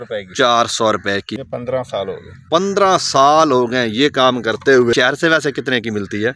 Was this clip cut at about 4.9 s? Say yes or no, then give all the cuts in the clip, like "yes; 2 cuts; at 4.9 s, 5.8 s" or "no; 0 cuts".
yes; 2 cuts; at 1.3 s, 4.9 s